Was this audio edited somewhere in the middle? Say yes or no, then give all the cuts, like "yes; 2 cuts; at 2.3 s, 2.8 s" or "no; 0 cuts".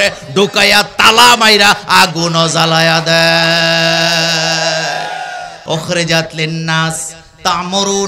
yes; 1 cut; at 5.5 s